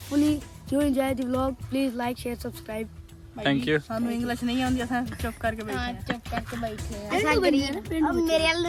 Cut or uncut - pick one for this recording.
uncut